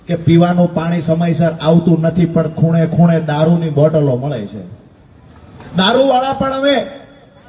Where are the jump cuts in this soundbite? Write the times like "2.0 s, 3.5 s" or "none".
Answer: none